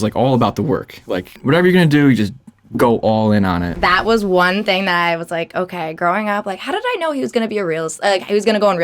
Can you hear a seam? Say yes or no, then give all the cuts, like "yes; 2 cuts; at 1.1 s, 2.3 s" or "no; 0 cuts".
yes; 2 cuts; at 1.3 s, 3.7 s